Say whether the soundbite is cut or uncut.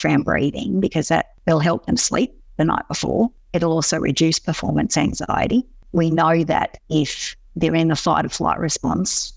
cut